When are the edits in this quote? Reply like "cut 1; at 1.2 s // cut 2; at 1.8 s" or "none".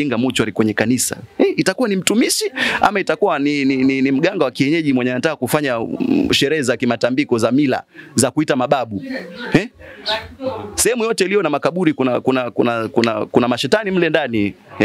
none